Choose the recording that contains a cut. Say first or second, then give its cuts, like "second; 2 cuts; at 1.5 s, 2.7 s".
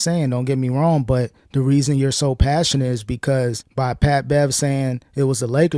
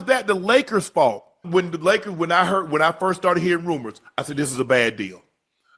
second; 1 cut; at 1.4 s